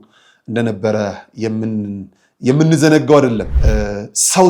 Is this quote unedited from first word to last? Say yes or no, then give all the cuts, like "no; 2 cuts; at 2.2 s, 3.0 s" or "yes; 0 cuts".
no; 1 cut; at 3.5 s